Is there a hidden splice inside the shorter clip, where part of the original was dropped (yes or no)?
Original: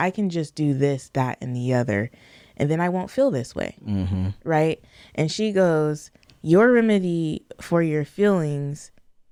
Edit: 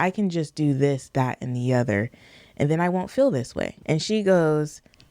yes